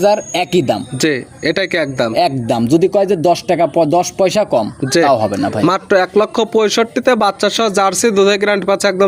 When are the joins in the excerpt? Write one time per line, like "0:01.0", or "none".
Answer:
none